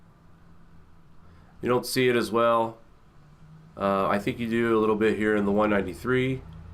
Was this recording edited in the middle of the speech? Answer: no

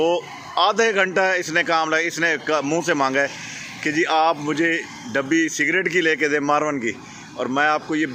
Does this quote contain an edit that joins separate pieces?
no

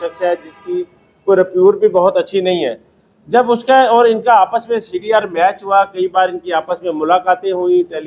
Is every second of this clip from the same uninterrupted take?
yes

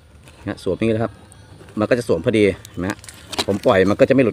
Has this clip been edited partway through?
no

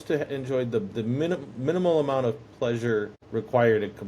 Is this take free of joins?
no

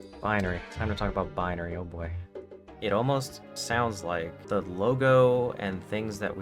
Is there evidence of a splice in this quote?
yes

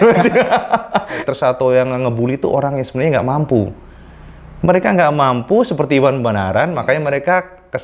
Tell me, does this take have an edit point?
yes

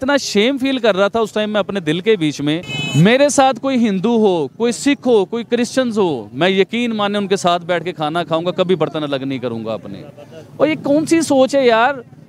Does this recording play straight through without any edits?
no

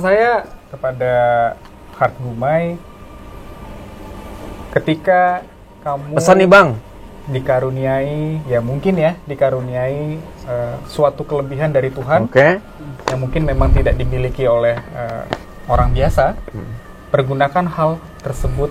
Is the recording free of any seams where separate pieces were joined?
yes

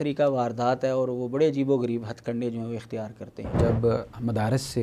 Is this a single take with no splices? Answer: no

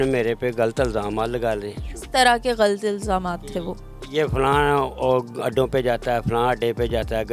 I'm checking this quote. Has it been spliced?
no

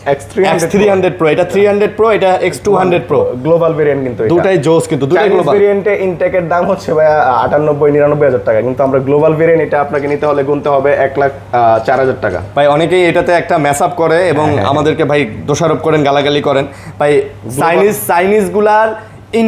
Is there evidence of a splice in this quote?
no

